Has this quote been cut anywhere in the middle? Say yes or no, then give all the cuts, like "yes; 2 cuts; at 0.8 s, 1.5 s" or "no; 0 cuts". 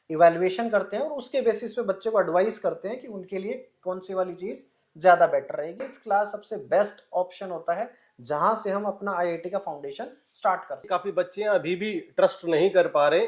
yes; 2 cuts; at 5.8 s, 10.8 s